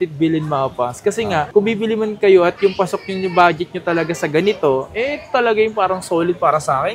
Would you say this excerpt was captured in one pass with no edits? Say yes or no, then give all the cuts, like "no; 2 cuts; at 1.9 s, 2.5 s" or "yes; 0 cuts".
yes; 0 cuts